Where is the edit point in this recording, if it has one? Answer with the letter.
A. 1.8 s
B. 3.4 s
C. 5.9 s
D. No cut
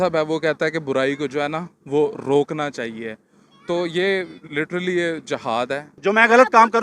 C